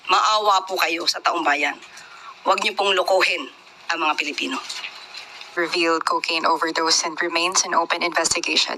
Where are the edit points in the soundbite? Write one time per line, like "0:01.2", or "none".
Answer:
0:05.5